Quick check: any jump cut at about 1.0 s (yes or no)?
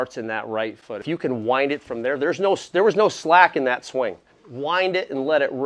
no